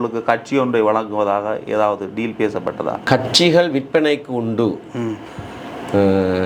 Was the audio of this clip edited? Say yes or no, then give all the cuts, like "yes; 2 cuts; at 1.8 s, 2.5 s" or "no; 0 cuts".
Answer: yes; 1 cut; at 3.0 s